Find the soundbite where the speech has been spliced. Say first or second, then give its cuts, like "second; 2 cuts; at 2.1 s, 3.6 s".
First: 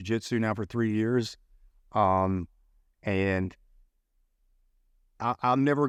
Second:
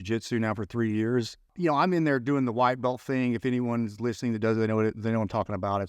second; 1 cut; at 1.5 s